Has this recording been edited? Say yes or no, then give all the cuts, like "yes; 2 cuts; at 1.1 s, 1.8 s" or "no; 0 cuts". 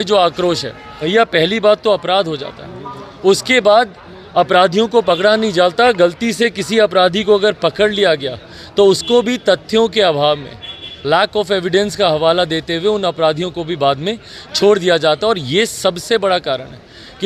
yes; 1 cut; at 1.1 s